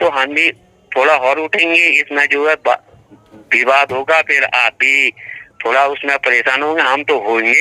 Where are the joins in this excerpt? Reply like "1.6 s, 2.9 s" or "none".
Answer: none

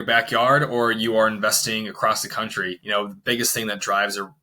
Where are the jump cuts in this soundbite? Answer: 2.8 s

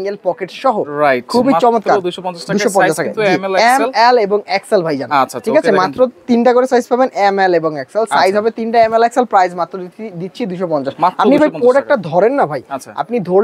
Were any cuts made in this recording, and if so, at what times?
none

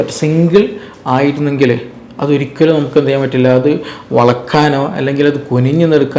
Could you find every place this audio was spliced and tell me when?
none

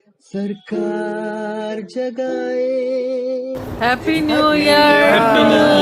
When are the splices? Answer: 3.6 s

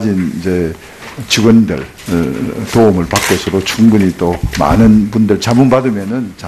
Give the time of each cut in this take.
1.7 s

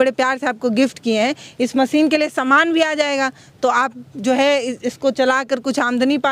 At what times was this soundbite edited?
none

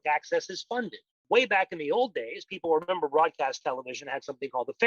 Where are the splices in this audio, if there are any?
1.2 s

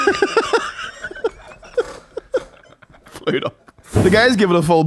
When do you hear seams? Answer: 3.9 s

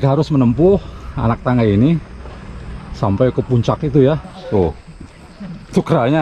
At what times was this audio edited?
4.3 s

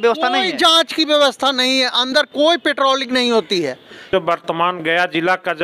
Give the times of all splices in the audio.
4.0 s

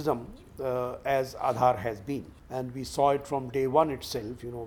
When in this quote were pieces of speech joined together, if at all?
2.4 s

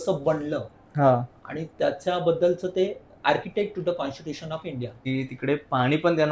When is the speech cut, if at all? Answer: 5.0 s

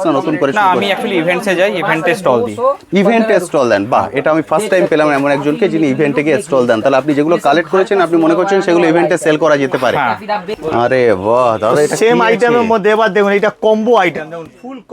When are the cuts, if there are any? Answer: 10.5 s

